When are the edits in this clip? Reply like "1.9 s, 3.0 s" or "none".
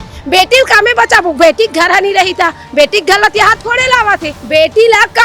4.3 s